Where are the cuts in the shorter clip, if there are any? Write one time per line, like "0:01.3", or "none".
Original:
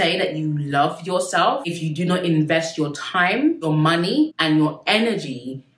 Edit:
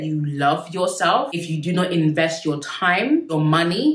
none